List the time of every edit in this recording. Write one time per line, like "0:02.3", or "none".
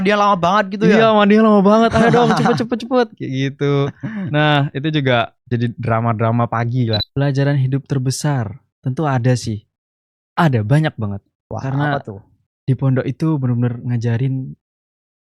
0:07.0

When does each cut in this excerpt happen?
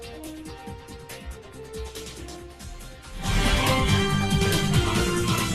none

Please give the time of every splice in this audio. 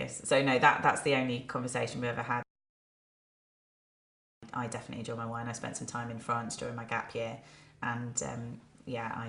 none

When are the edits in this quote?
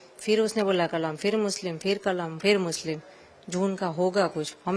none

